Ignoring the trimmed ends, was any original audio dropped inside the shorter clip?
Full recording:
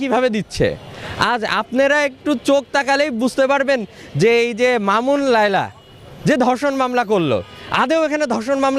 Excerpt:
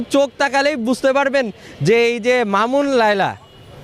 no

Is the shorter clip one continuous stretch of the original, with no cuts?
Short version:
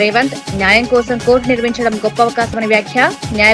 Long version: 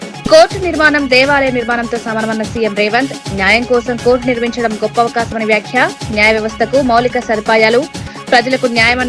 yes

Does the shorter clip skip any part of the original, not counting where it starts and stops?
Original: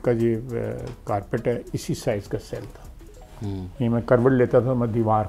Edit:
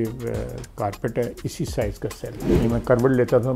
yes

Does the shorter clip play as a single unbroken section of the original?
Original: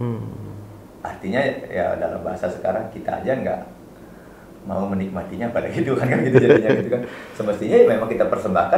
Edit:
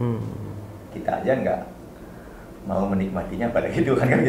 no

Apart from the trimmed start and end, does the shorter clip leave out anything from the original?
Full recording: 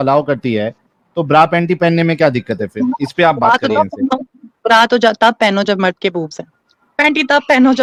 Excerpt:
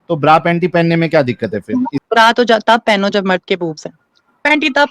yes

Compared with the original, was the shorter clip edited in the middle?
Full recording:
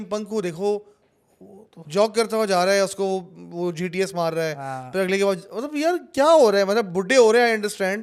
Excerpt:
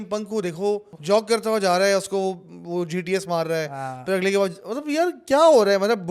yes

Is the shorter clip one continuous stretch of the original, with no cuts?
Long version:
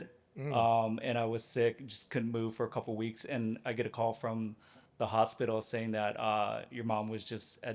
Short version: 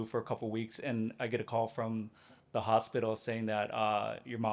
yes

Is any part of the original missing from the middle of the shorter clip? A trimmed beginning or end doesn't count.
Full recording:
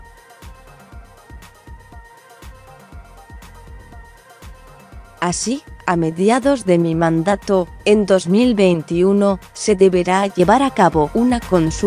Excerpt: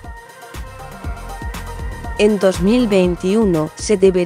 yes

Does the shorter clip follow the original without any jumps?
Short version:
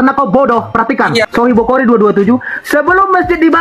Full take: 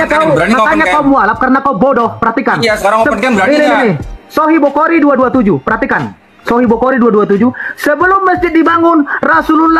no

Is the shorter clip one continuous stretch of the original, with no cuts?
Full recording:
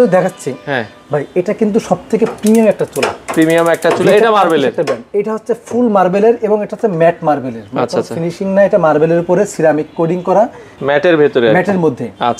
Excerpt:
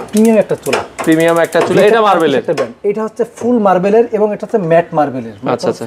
yes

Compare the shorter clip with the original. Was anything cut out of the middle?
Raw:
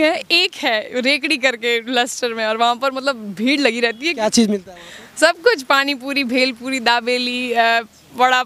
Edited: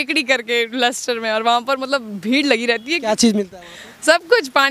no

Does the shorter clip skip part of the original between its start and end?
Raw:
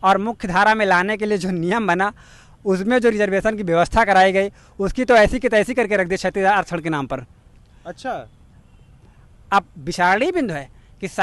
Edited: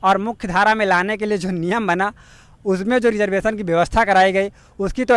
no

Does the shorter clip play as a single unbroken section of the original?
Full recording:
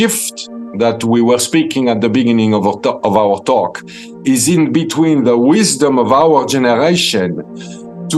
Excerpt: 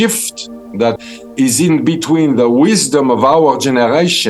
no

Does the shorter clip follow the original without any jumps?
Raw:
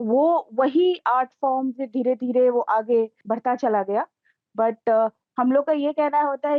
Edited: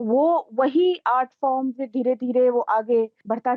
yes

